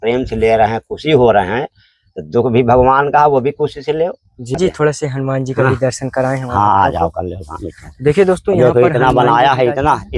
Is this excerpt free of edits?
no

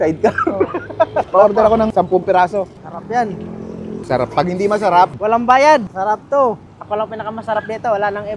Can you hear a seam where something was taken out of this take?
no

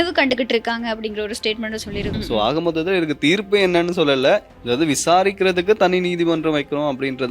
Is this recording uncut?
no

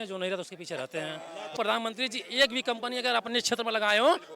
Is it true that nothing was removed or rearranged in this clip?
no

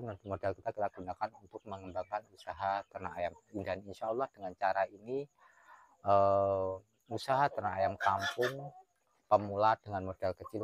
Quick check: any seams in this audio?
no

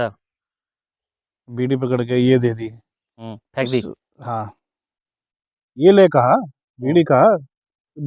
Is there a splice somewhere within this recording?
no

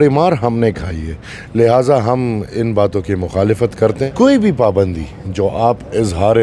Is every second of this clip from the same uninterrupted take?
no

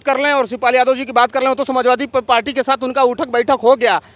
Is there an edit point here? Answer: no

